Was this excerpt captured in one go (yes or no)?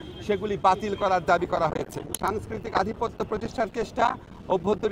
no